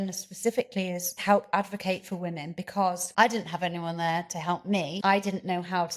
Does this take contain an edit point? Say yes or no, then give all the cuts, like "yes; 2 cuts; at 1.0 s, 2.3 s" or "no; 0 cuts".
yes; 3 cuts; at 1.2 s, 3.0 s, 4.9 s